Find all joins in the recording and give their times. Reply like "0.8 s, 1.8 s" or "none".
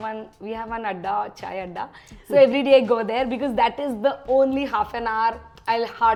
none